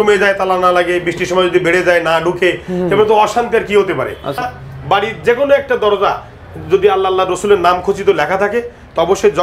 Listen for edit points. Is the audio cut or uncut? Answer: cut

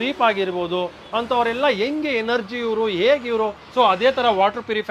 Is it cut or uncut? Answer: cut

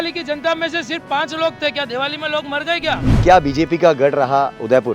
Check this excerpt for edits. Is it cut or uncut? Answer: cut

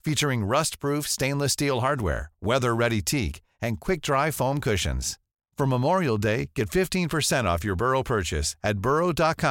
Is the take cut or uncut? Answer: uncut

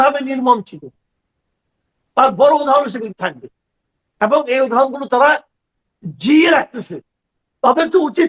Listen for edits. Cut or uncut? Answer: uncut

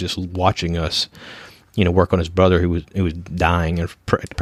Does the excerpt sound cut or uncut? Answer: uncut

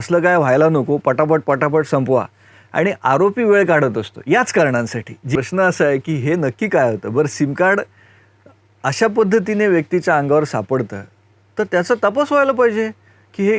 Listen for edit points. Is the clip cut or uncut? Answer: cut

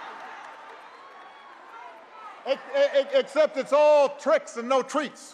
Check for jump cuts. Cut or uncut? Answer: uncut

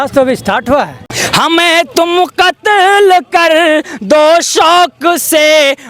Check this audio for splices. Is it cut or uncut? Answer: cut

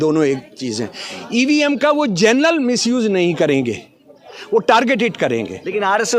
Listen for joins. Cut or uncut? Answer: uncut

